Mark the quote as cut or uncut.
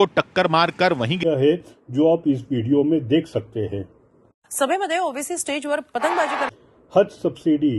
cut